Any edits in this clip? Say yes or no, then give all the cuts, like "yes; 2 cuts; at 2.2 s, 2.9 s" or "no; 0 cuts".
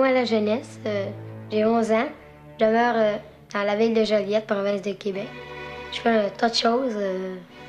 no; 0 cuts